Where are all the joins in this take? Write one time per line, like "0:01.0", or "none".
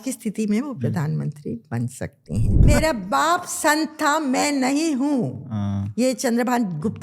0:02.6